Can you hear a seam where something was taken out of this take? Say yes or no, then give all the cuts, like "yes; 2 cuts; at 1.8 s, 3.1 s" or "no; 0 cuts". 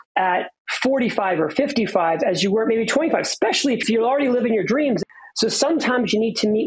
yes; 2 cuts; at 3.8 s, 5.1 s